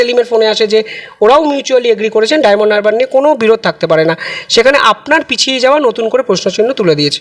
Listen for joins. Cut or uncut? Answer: uncut